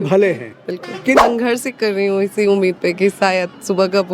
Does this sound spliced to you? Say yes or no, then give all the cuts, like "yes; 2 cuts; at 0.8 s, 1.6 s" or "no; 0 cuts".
yes; 1 cut; at 1.2 s